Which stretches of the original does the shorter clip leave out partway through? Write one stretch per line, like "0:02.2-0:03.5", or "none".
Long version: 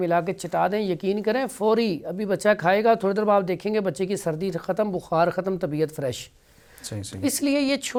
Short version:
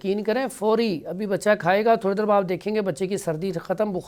none